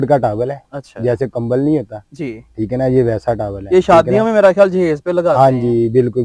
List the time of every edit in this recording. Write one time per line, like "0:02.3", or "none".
none